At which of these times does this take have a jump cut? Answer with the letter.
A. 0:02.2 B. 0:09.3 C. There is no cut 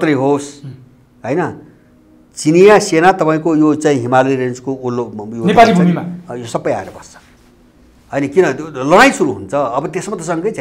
C